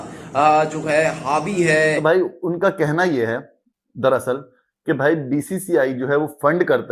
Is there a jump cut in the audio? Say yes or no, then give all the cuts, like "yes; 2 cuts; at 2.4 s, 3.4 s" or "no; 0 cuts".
yes; 1 cut; at 2.0 s